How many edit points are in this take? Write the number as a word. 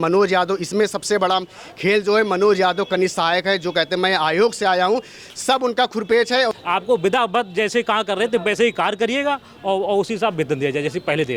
one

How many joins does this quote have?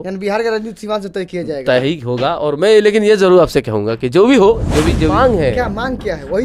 one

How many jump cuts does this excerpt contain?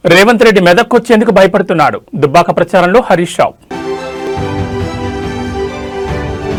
zero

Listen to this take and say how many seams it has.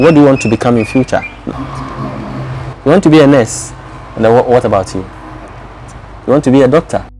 one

